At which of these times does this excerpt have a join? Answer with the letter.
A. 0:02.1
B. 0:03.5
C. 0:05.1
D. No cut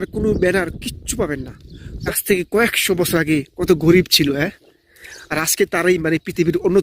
A